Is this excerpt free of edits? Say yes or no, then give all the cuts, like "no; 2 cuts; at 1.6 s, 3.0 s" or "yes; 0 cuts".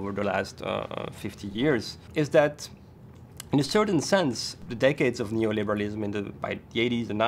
no; 2 cuts; at 2.0 s, 4.5 s